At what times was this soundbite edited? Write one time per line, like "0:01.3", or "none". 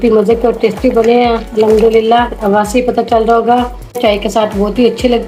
0:04.0